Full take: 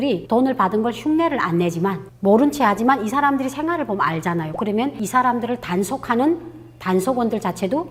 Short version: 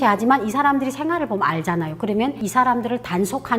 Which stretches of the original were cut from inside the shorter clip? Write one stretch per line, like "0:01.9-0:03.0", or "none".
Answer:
none